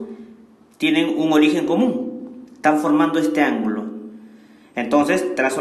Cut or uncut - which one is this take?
cut